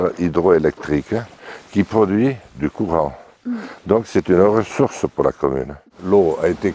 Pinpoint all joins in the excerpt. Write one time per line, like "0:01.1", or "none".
0:01.3
0:05.8